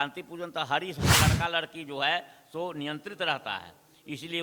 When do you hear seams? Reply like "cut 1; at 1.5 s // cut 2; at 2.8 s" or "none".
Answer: cut 1; at 1.1 s